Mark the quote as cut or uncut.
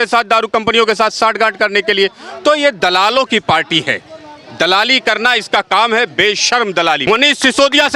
cut